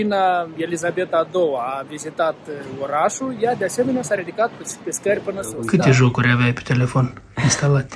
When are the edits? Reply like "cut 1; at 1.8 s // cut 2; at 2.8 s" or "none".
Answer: cut 1; at 5.6 s

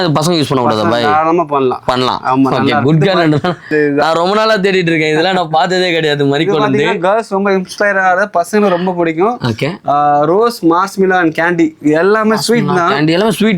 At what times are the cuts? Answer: cut 1; at 3.7 s

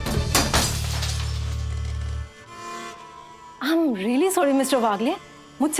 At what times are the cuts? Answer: none

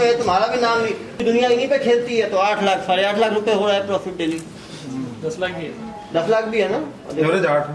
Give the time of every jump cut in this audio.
cut 1; at 1.2 s

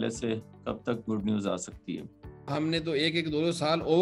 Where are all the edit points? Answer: cut 1; at 2.5 s

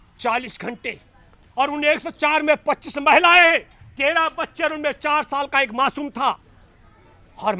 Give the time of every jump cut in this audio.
none

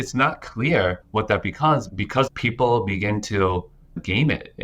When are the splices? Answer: cut 1; at 1.0 s // cut 2; at 2.3 s

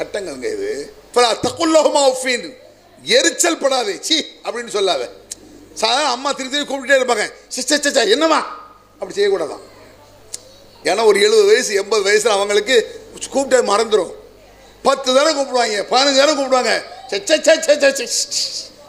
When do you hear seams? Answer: cut 1; at 0.9 s

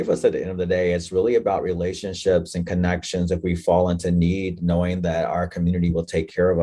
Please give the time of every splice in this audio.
none

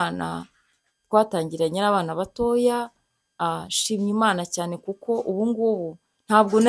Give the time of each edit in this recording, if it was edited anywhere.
none

